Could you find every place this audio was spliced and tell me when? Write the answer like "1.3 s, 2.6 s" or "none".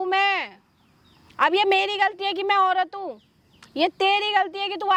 none